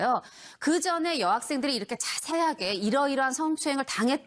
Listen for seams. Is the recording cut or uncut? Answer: uncut